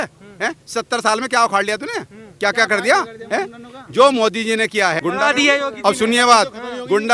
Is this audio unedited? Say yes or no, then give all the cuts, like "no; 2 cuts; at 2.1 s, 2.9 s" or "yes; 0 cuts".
no; 1 cut; at 5.0 s